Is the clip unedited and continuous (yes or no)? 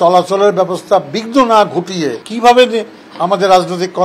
no